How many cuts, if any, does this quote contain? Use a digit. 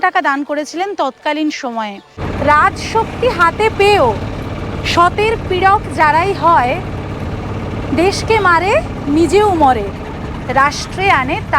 1